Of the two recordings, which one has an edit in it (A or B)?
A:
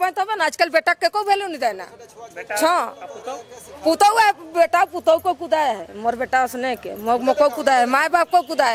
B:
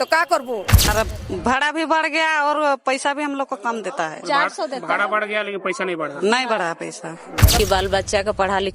B